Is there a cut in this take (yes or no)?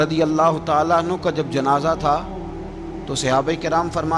no